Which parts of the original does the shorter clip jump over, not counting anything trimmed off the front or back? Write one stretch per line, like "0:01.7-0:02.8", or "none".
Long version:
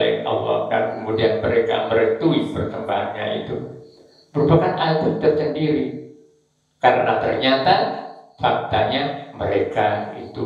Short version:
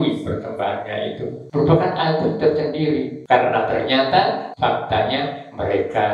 0:03.7-0:04.2
0:06.0-0:06.7
0:08.0-0:08.3